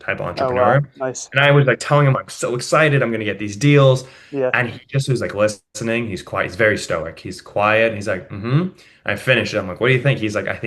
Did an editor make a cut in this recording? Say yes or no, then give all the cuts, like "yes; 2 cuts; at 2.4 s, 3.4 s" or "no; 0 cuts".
no; 0 cuts